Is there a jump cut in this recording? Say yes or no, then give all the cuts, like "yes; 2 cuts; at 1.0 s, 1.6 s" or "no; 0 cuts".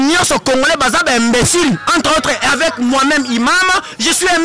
no; 0 cuts